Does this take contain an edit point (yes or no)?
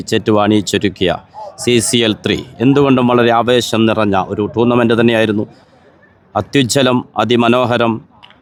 no